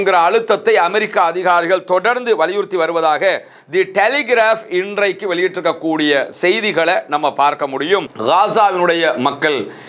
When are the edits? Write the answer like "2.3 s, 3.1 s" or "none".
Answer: 8.1 s